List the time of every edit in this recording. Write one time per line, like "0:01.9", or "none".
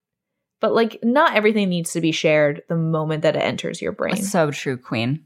0:04.2